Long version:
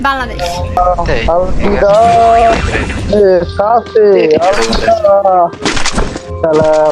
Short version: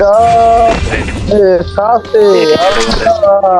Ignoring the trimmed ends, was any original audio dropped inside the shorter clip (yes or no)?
no